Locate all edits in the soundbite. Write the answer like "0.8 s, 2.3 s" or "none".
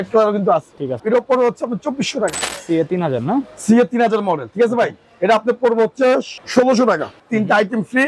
1.0 s, 2.4 s, 6.4 s, 7.2 s